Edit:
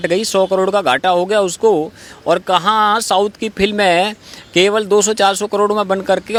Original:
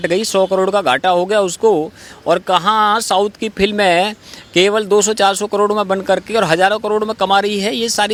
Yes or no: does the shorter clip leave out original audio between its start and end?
no